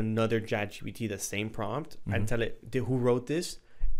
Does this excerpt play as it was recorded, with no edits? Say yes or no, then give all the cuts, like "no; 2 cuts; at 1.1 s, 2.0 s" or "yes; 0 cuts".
yes; 0 cuts